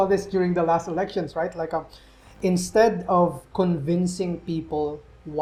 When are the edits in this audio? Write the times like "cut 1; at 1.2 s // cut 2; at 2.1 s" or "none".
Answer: none